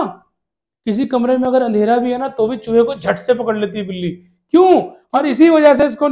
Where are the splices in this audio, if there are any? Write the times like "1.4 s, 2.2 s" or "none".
5.0 s